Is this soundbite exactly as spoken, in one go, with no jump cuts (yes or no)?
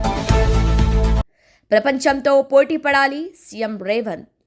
no